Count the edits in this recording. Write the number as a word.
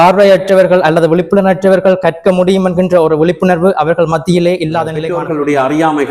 one